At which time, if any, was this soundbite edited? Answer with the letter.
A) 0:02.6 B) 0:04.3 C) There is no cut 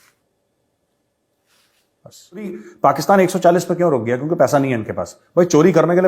A